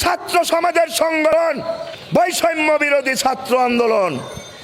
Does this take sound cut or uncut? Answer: cut